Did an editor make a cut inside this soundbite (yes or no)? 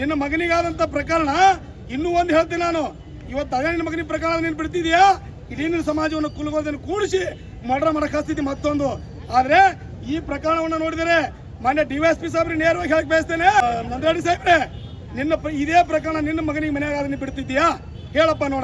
yes